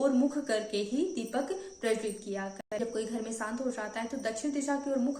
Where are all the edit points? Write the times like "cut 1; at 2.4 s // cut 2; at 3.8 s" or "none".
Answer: cut 1; at 2.6 s